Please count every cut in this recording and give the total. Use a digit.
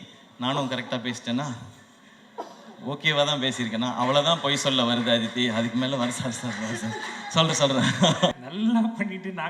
1